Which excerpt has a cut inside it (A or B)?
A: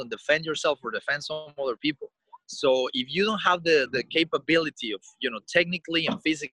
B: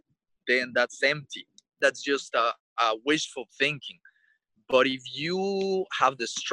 B